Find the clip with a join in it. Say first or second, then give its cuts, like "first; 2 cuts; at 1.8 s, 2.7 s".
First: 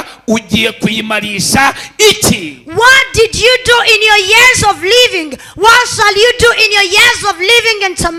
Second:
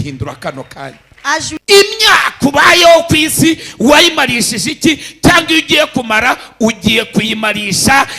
second; 1 cut; at 1.5 s